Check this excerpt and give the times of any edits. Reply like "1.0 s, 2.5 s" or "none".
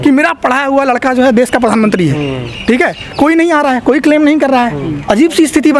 none